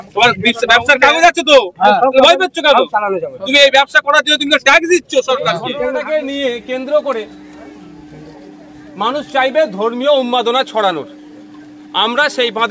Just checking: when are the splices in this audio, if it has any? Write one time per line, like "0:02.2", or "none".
0:05.7